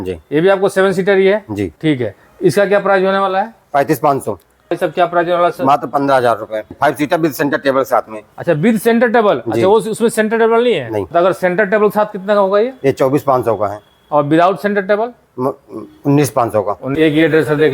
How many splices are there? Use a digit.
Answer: 5